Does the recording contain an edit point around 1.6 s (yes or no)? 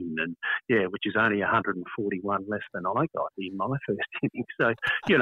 no